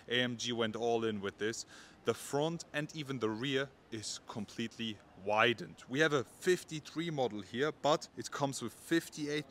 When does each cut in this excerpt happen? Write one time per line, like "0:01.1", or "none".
none

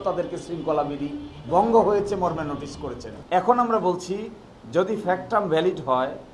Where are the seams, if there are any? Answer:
0:03.1

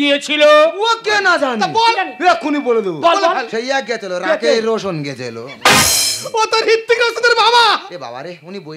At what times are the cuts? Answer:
none

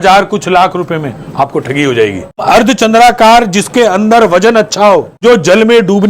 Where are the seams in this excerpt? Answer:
0:02.4
0:05.1

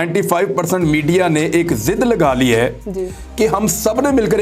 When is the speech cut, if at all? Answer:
none

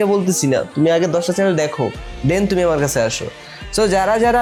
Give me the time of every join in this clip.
none

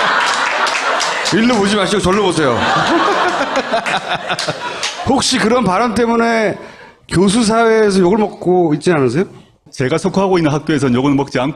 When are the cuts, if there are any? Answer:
0:05.8

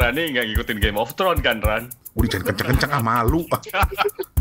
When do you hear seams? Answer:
0:02.0

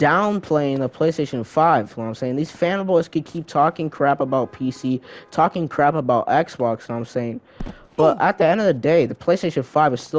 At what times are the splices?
0:02.4

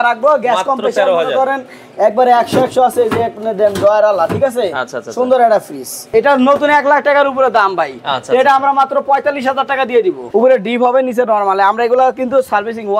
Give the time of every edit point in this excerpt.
0:06.0
0:10.2

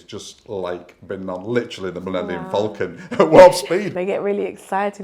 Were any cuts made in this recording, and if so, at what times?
0:03.9

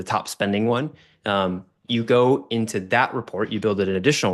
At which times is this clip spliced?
none

